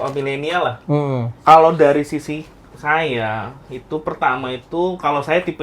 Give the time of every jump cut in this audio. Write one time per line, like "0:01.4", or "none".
0:01.3